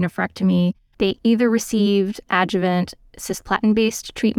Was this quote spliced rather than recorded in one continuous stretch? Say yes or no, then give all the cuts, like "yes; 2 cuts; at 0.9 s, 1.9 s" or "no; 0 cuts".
yes; 1 cut; at 1.1 s